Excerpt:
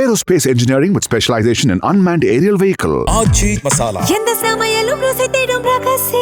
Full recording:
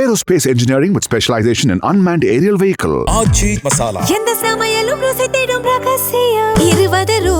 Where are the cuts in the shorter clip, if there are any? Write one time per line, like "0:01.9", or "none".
none